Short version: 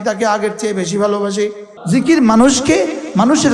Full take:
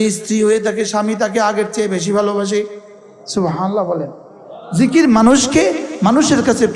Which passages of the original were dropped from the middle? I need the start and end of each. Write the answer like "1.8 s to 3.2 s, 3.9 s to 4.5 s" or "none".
2.8 s to 4.6 s